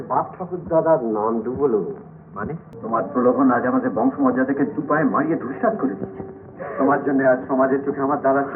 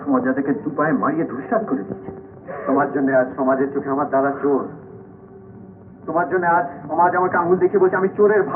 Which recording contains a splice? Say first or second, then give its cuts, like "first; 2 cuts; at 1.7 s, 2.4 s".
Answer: first; 1 cut; at 2.7 s